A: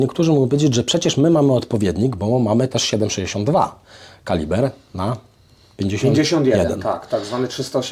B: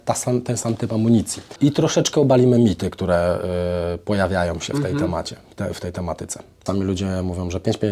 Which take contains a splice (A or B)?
B